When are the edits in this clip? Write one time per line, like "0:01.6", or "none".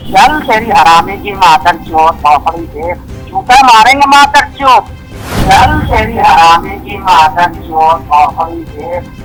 none